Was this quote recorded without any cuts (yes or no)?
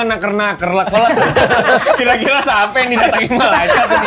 yes